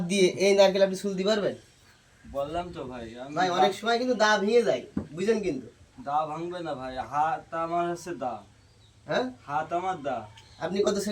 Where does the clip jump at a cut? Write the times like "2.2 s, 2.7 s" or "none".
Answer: none